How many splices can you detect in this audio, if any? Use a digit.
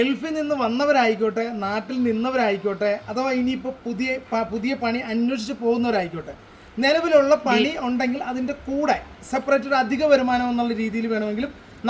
0